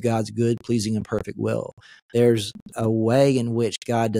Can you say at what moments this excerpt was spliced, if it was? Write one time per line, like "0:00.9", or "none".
none